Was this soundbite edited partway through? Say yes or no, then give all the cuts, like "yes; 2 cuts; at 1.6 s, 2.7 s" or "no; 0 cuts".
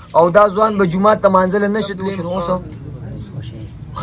yes; 1 cut; at 2.1 s